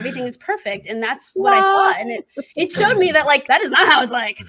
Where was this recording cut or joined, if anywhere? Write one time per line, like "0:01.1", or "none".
0:03.4